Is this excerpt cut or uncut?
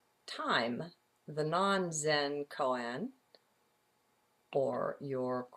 cut